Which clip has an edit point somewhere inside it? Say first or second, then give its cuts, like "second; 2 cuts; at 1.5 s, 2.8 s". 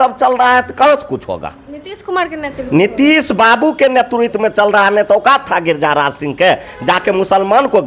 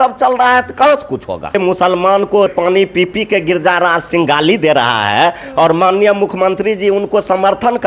second; 2 cuts; at 1.5 s, 2.5 s